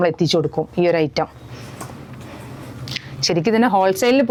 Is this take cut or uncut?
uncut